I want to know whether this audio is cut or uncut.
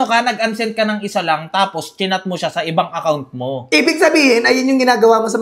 uncut